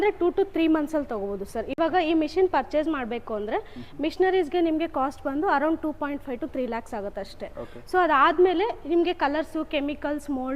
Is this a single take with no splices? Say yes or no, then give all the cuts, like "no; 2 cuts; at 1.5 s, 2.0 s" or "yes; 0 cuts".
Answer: yes; 0 cuts